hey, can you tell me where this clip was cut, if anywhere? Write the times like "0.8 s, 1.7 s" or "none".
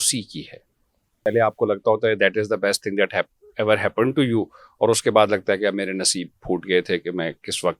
1.3 s